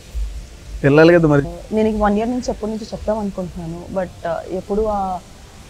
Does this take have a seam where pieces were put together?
yes; 1 cut; at 1.5 s

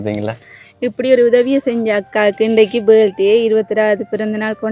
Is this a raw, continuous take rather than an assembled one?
yes; 0 cuts

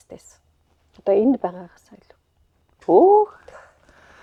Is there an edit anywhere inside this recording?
no; 0 cuts

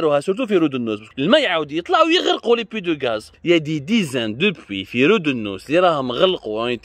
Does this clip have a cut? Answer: yes; 2 cuts; at 1.0 s, 3.3 s

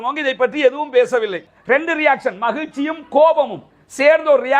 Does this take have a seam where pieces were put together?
yes; 1 cut; at 1.5 s

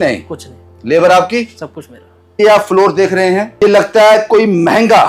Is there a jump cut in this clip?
yes; 2 cuts; at 2.4 s, 3.6 s

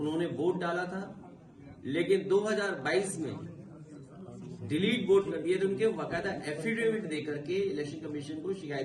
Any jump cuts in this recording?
no; 0 cuts

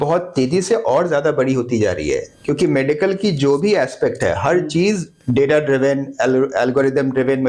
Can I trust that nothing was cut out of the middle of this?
yes; 0 cuts

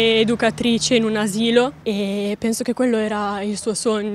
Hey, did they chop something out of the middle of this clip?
no; 0 cuts

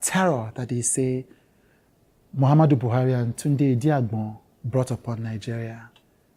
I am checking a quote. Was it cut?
no; 0 cuts

